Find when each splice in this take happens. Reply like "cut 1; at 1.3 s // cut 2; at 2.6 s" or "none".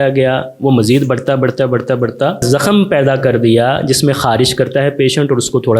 cut 1; at 2.4 s